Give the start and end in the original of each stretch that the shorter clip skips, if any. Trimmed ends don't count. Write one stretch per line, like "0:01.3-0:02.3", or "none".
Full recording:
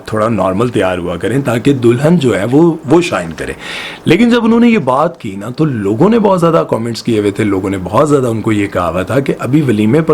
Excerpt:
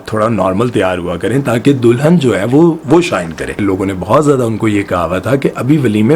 0:03.6-0:07.4